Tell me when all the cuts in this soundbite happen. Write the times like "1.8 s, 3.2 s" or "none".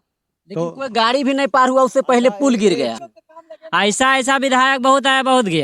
3.0 s

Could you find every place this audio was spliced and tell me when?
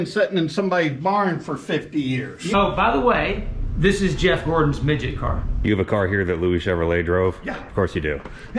2.5 s, 5.5 s, 7.5 s

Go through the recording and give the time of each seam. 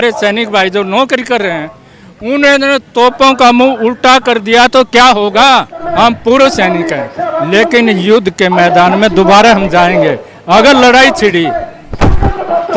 5.8 s

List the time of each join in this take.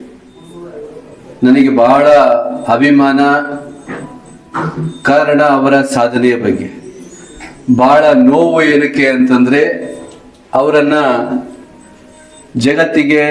none

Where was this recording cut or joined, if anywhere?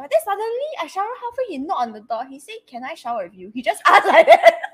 3.4 s

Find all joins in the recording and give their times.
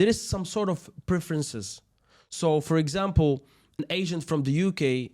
3.7 s

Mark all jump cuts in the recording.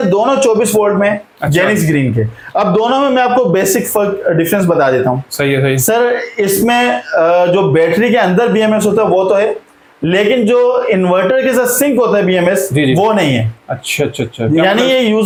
none

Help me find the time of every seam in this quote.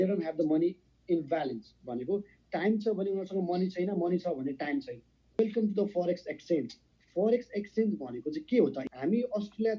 5.4 s, 8.8 s

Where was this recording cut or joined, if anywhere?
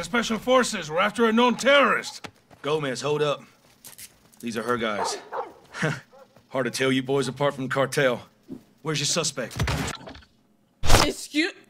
none

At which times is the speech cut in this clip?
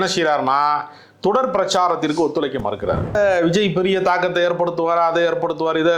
3.2 s

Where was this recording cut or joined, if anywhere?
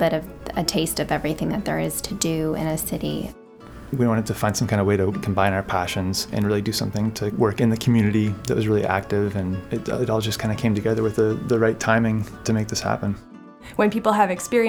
3.3 s, 5.2 s, 6.3 s, 7.3 s, 8.4 s, 9.6 s, 12.3 s, 13.6 s

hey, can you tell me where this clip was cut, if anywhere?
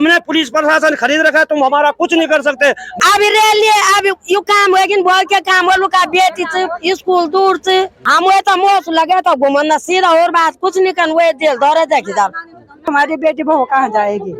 2.9 s, 8.0 s, 12.9 s

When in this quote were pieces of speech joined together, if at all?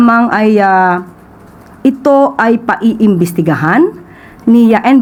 none

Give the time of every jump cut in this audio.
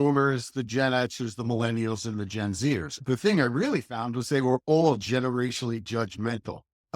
3.0 s

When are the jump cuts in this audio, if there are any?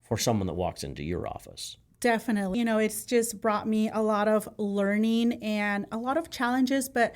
2.5 s

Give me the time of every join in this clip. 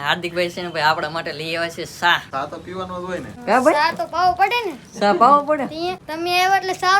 2.3 s, 3.4 s, 6.0 s

